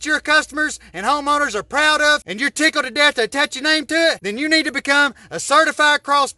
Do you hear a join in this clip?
yes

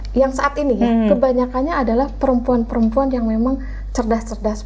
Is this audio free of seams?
yes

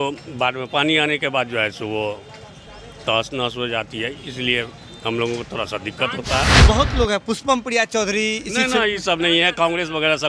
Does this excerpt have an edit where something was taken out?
yes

